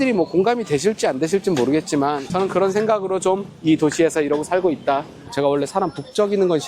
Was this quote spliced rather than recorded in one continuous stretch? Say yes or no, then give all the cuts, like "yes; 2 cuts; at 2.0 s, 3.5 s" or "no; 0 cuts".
yes; 2 cuts; at 2.3 s, 5.3 s